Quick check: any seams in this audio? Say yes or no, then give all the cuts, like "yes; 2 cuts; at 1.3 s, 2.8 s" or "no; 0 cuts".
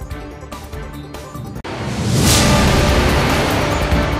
yes; 1 cut; at 1.6 s